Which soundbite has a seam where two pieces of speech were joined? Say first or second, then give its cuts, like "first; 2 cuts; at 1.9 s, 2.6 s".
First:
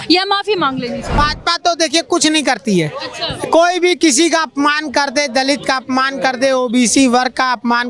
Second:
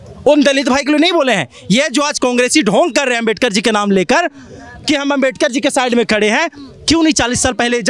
first; 1 cut; at 1.1 s